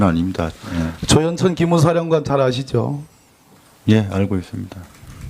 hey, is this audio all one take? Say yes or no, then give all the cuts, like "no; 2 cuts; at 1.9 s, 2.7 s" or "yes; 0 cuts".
no; 1 cut; at 1.7 s